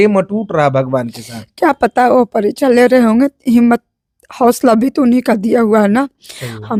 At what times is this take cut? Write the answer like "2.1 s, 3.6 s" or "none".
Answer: none